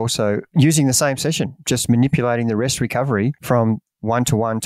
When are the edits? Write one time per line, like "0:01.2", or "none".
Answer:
0:03.4